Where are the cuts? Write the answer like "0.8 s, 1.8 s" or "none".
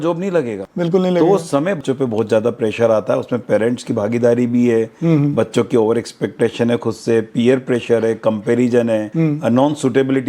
1.8 s

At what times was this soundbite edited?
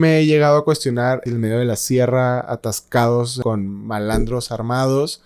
1.2 s, 3.4 s

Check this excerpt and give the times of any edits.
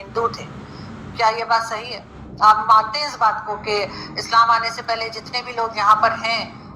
none

